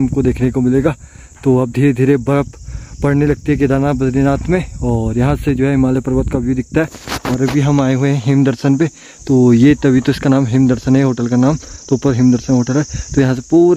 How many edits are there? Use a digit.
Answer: 0